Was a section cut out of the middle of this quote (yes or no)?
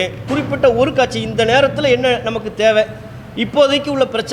no